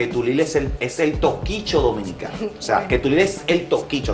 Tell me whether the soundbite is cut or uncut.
uncut